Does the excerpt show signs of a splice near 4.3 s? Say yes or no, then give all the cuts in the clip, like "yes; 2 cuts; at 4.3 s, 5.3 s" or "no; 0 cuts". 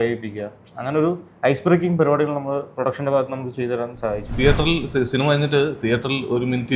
yes; 1 cut; at 4.3 s